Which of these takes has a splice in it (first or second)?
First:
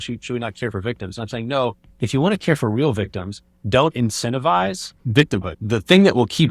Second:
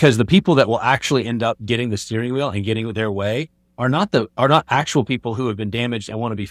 first